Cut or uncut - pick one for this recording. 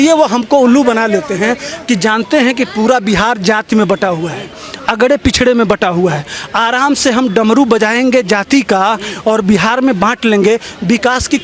uncut